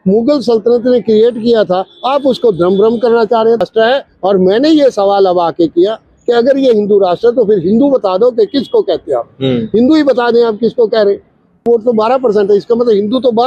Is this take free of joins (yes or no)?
no